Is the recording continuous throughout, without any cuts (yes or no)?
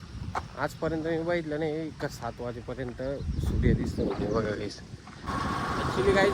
no